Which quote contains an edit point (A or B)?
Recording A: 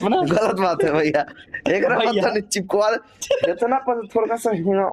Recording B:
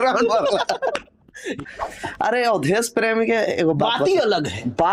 B